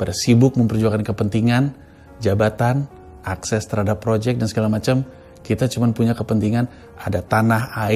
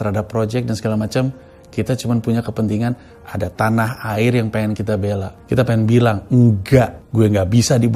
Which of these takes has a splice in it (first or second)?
second